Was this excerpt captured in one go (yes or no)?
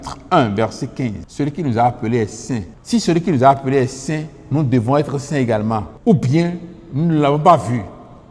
no